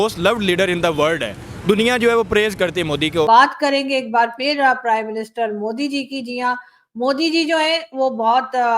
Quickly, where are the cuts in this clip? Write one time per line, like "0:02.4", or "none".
0:03.3